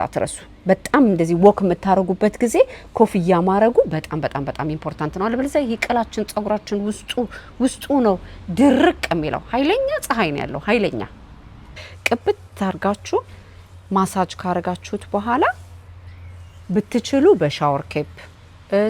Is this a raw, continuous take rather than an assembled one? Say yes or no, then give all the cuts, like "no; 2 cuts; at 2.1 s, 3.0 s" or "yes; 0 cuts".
no; 1 cut; at 11.7 s